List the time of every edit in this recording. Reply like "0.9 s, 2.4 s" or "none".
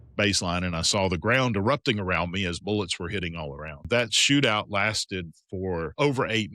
3.9 s